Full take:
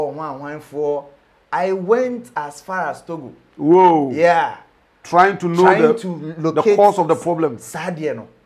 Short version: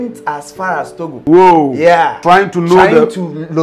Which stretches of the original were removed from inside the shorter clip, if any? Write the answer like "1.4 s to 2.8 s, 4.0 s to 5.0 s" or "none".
3.2 s to 3.5 s, 4.5 s to 5.0 s

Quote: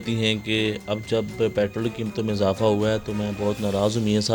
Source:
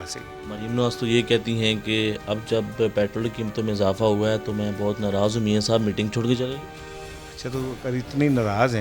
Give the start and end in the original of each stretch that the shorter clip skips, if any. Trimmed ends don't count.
none

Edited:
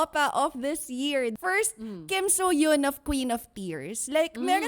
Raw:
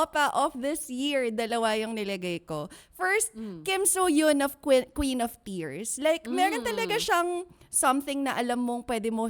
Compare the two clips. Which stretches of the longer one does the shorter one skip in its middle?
1.3 s to 2.9 s, 4.6 s to 4.9 s

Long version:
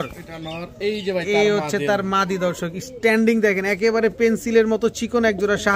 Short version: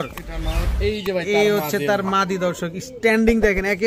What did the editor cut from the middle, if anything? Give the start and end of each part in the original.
none

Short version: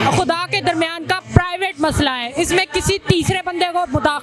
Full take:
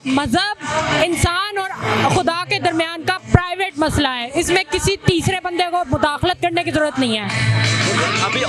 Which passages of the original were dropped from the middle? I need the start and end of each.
none

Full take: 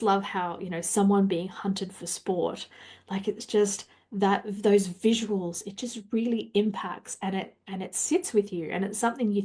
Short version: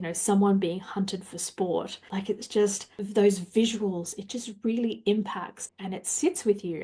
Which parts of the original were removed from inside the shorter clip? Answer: 2.7 s to 3.0 s, 4.0 s to 4.5 s, 7.1 s to 7.5 s

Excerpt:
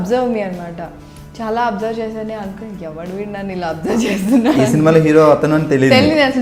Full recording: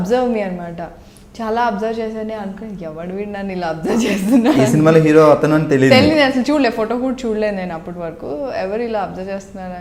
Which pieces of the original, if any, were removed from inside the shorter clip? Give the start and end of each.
none

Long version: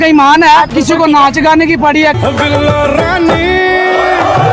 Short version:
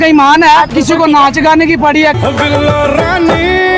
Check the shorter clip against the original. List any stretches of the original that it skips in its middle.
none

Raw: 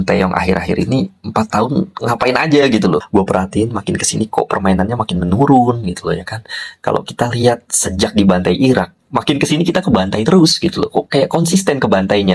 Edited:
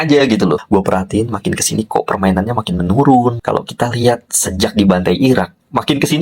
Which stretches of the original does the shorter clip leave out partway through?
5.8 s to 6.8 s

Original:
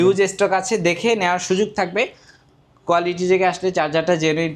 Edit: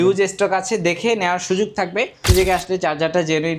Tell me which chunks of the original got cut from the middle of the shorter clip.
2.2 s to 3.2 s

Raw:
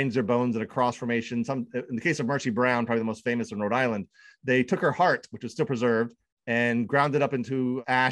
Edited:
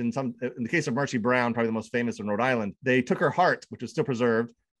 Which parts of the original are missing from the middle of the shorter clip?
4.1 s to 4.4 s

